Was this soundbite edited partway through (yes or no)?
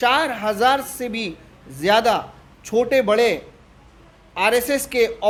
no